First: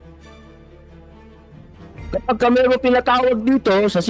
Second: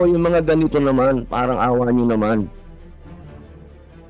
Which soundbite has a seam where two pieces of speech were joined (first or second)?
second